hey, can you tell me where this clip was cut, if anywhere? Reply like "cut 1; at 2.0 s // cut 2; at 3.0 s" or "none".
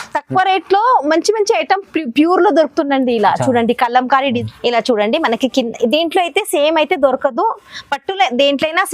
cut 1; at 4.4 s